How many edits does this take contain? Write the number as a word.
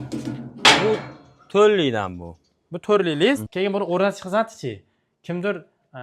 one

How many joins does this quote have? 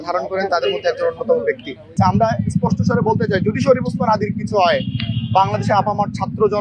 one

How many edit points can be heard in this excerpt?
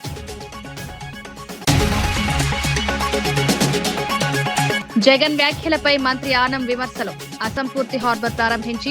three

